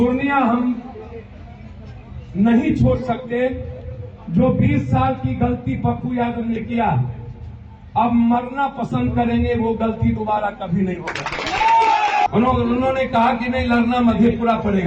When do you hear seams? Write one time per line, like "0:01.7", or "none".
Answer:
0:12.3